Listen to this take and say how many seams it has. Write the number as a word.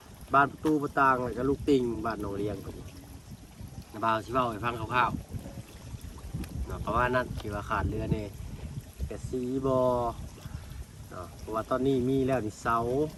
zero